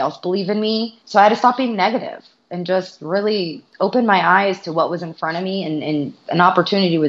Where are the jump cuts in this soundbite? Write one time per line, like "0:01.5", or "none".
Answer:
0:01.0
0:03.6
0:06.2